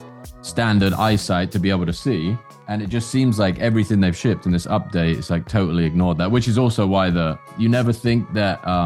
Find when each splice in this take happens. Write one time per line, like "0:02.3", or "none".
0:02.5
0:07.5